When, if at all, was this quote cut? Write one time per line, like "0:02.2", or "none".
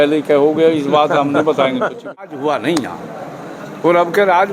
0:02.1